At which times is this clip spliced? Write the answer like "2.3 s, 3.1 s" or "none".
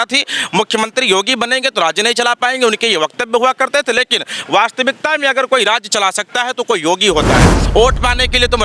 7.6 s